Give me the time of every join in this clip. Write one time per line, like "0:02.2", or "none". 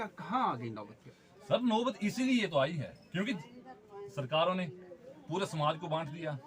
none